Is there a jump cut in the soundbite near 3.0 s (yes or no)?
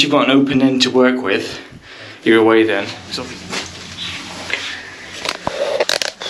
yes